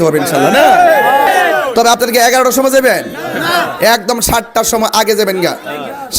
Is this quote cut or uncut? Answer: cut